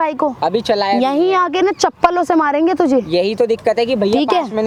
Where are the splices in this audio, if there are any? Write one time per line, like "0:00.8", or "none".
none